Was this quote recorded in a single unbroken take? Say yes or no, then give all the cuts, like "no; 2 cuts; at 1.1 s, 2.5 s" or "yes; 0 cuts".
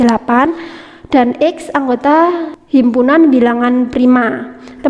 no; 1 cut; at 2.5 s